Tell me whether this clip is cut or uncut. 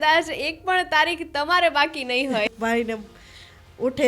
cut